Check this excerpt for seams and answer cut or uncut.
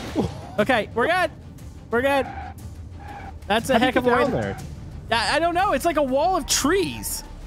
uncut